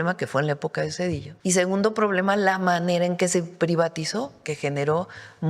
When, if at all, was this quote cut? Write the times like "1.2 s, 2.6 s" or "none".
1.3 s